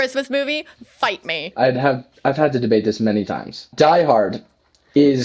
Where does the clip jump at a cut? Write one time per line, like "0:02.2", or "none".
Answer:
0:01.5
0:03.7